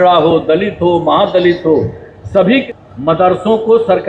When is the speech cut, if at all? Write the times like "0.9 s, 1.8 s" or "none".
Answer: 2.6 s